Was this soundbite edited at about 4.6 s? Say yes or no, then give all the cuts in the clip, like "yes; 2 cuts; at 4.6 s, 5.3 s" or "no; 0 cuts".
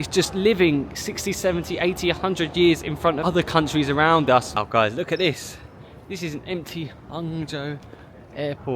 yes; 2 cuts; at 3.2 s, 4.6 s